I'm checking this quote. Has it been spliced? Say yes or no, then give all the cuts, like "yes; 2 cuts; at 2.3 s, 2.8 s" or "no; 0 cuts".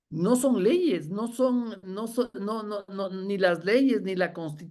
no; 0 cuts